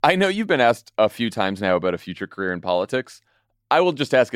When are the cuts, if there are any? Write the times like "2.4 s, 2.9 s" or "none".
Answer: 0.9 s